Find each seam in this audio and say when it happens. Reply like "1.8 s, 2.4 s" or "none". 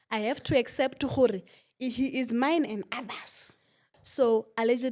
3.9 s